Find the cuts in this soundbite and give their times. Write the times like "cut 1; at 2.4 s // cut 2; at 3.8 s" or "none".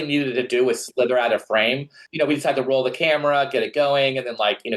cut 1; at 2.0 s